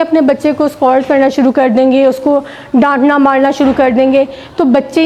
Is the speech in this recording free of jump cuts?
yes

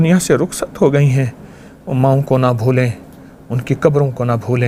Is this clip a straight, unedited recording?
yes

